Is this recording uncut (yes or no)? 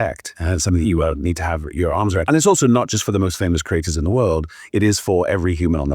no